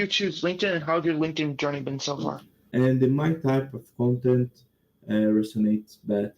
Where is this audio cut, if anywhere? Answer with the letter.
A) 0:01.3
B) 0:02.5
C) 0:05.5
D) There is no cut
B